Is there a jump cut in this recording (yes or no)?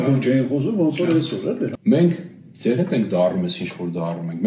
yes